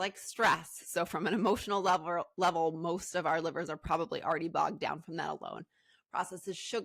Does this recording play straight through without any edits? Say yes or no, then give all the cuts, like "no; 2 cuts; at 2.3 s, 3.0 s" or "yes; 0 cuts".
yes; 0 cuts